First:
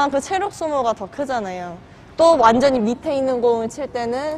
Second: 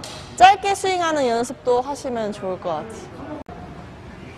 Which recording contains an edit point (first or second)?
second